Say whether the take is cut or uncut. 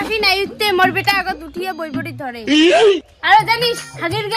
uncut